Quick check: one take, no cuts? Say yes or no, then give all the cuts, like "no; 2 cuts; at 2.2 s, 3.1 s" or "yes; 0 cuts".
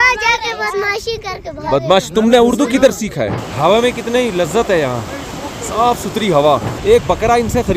no; 2 cuts; at 3.5 s, 6.7 s